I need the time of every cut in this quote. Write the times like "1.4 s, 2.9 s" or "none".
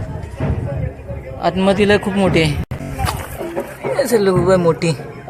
2.7 s